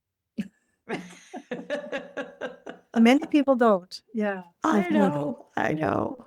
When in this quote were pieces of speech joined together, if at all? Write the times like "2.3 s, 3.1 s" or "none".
none